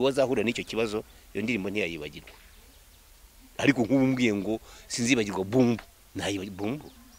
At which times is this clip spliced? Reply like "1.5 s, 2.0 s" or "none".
6.0 s